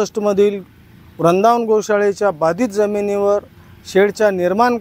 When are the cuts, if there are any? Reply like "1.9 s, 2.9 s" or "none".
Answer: none